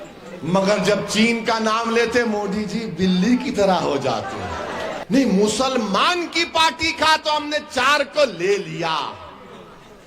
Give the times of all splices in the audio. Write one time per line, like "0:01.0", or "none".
0:05.0